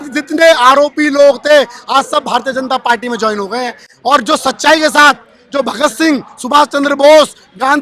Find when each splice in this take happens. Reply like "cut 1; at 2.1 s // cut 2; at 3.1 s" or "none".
none